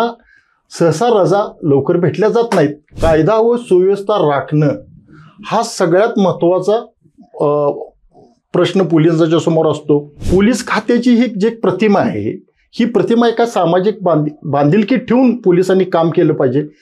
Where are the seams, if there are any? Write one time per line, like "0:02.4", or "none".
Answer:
0:02.9
0:10.1